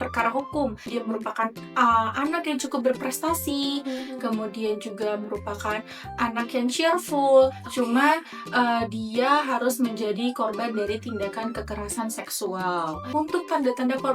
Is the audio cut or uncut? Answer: cut